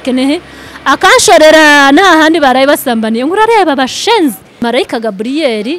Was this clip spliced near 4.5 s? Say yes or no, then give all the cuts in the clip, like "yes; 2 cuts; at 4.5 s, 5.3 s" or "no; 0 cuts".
yes; 1 cut; at 4.5 s